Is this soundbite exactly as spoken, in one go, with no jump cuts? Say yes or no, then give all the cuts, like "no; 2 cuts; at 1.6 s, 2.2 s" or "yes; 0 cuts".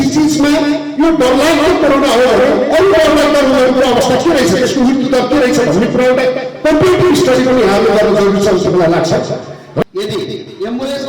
no; 1 cut; at 9.8 s